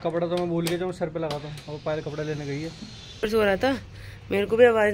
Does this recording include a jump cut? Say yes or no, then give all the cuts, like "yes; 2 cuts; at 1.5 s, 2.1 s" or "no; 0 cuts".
yes; 1 cut; at 3.3 s